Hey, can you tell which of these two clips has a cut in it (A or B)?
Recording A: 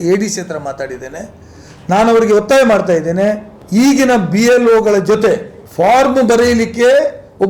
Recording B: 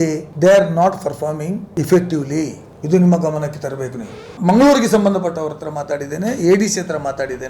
B